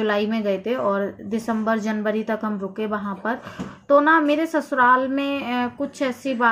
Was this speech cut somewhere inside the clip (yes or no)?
no